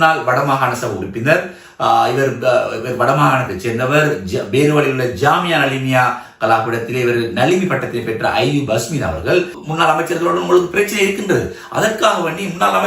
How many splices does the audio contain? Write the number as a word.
one